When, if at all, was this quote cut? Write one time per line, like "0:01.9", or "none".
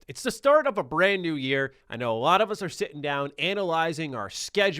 0:01.8